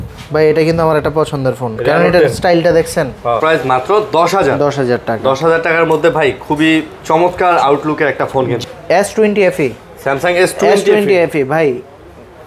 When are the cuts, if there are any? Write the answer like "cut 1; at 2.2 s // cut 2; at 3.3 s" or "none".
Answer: cut 1; at 3.4 s // cut 2; at 8.6 s